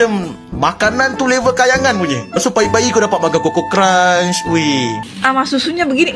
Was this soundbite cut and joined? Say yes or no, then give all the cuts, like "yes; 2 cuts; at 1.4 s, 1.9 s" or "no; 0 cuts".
yes; 1 cut; at 5.1 s